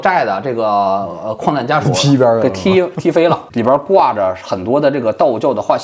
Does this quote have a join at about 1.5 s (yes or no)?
no